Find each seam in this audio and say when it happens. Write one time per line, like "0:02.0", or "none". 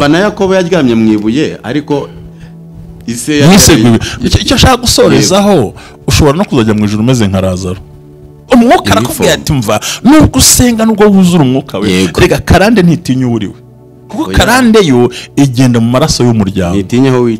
0:08.4

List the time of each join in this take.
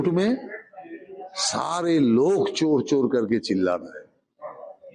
none

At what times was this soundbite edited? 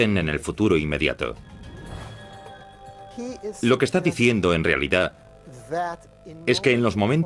none

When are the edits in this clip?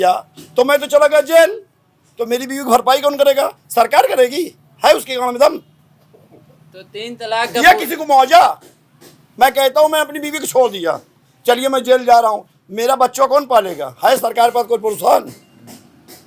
none

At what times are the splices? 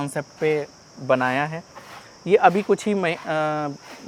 none

